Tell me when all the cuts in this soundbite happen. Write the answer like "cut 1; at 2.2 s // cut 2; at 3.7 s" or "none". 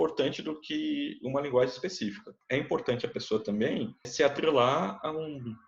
cut 1; at 2.3 s // cut 2; at 4.1 s